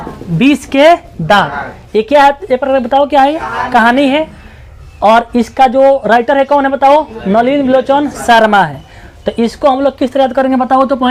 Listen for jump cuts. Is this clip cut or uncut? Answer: uncut